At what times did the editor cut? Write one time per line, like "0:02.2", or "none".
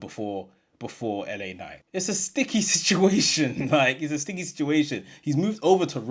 0:01.9